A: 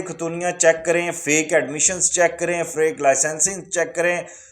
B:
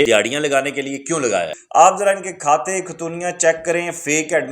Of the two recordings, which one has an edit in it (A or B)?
B